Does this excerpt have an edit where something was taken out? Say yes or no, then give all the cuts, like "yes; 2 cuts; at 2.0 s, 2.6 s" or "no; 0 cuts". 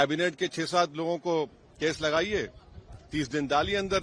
no; 0 cuts